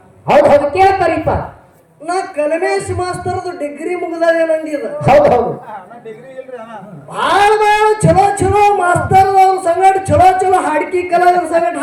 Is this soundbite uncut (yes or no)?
yes